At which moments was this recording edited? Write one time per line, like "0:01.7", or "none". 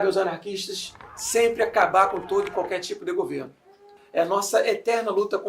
0:03.9